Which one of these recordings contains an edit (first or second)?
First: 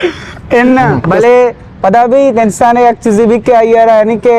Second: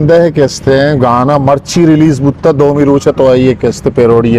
first